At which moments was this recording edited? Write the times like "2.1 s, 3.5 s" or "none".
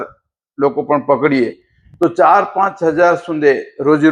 none